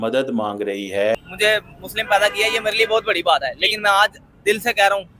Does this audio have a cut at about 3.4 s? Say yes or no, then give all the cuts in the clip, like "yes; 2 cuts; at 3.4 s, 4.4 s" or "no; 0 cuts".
no; 1 cut; at 1.2 s